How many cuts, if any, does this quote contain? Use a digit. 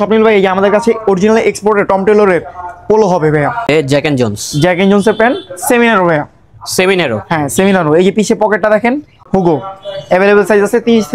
2